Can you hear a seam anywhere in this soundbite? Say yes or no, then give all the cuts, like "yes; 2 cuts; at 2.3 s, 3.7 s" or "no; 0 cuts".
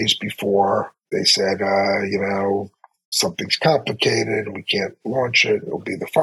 no; 0 cuts